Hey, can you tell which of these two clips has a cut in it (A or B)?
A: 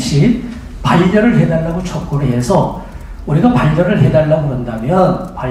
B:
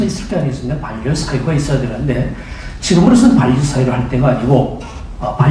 B